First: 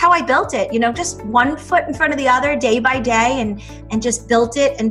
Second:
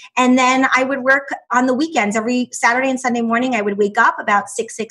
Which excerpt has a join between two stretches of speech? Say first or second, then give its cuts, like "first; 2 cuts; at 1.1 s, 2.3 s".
second; 1 cut; at 1.5 s